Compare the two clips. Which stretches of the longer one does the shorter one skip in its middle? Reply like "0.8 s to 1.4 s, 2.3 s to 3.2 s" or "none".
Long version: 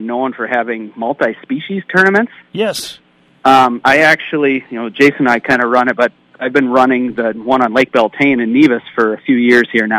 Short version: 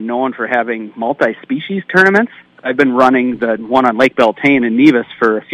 2.4 s to 6.2 s